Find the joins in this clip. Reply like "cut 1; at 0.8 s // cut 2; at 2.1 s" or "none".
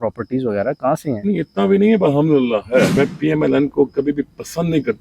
cut 1; at 2.9 s